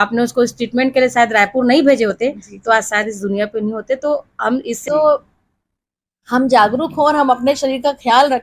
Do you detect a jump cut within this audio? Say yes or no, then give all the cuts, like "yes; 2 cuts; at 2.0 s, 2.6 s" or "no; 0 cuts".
yes; 1 cut; at 4.8 s